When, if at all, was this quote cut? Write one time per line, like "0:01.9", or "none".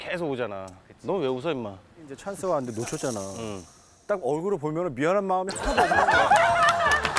0:02.2

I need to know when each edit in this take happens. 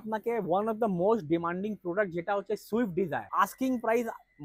0:03.2

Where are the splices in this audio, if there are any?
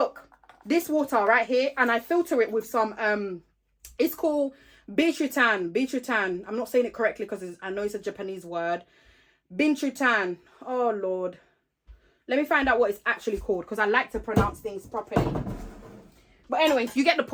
none

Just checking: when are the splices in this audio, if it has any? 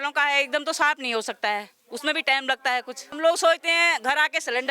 0:03.2

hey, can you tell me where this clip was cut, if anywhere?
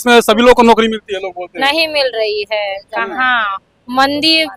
none

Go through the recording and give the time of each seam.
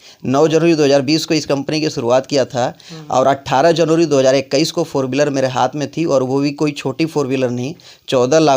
none

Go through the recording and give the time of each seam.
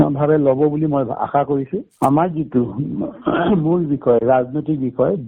0:01.8

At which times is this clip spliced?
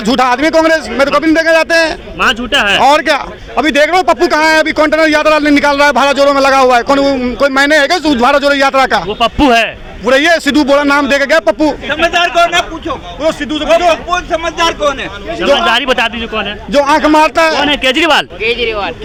none

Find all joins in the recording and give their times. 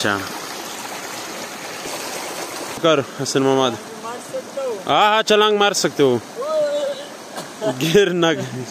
0:02.8

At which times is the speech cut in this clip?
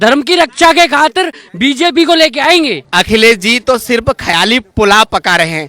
0:02.8

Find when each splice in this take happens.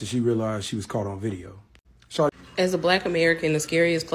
0:02.3

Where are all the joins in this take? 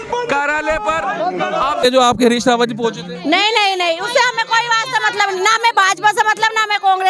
0:01.8

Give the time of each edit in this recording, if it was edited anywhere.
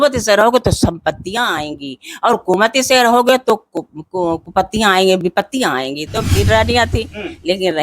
0:06.3

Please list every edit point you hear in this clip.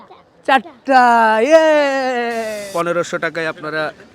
0:02.6

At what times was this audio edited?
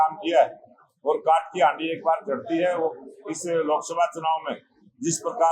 none

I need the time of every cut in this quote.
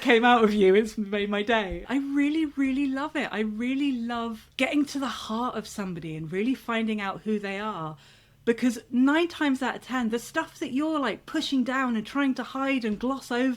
0:01.8

